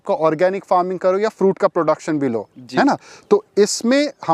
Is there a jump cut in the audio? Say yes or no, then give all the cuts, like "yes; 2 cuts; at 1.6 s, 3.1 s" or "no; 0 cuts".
no; 0 cuts